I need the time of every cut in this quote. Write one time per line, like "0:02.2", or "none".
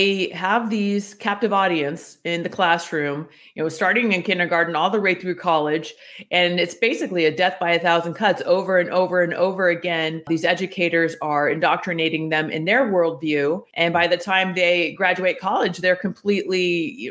0:10.3
0:13.7

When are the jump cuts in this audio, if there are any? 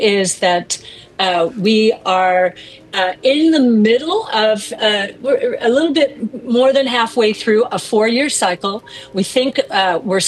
none

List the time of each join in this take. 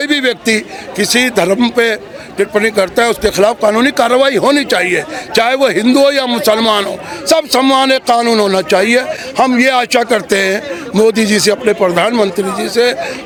none

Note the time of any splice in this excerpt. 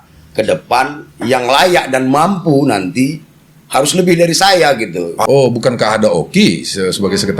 0:05.2

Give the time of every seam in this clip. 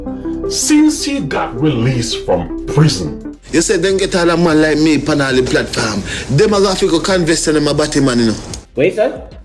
0:03.3
0:08.6

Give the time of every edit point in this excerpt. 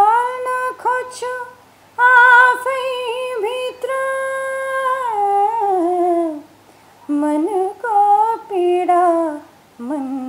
none

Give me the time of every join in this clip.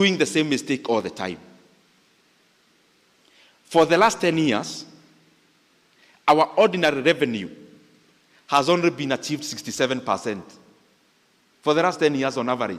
none

